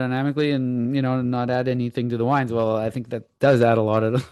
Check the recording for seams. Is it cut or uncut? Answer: uncut